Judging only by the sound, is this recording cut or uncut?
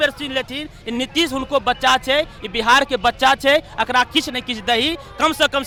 uncut